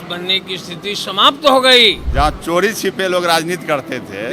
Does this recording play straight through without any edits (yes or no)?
no